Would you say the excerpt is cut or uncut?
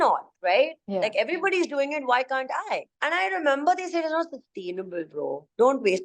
cut